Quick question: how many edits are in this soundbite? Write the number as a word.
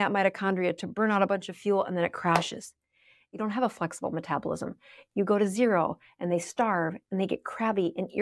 one